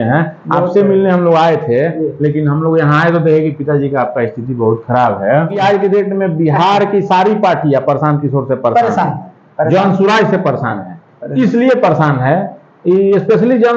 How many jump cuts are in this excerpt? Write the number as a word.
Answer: one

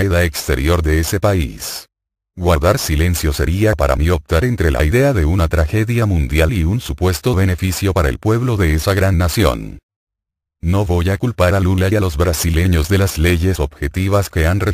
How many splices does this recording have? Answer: one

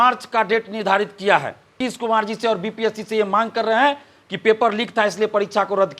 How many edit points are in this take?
one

